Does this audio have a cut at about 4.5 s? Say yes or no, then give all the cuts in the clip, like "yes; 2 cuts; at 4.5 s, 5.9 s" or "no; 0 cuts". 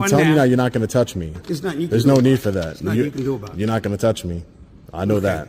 no; 1 cut; at 1.4 s